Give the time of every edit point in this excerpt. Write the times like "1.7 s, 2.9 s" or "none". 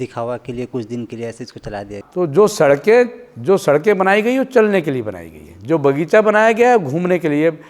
2.0 s